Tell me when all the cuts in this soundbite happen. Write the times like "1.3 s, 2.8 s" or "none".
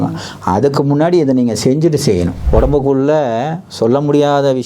2.4 s